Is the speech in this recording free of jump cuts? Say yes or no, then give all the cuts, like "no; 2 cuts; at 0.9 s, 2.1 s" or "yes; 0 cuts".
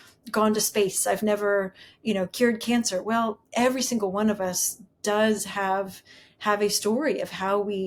yes; 0 cuts